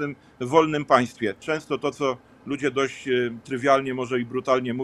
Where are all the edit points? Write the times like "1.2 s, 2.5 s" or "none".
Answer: 1.4 s

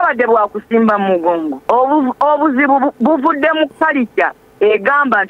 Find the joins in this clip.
1.5 s

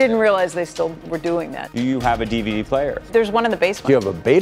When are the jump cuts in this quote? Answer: 3.1 s

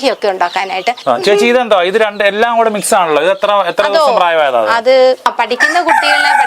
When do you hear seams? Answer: 1.0 s, 5.2 s

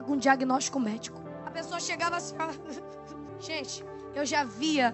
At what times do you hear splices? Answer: 1.2 s, 3.3 s

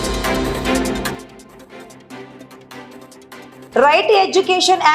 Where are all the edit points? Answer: 1.2 s, 3.7 s

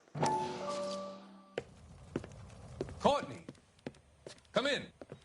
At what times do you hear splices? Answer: 1.4 s

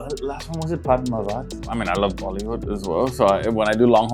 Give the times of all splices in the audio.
1.7 s

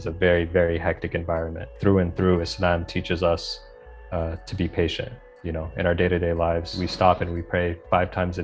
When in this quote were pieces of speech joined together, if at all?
1.7 s, 6.8 s

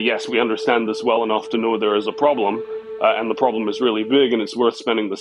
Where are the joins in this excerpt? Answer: none

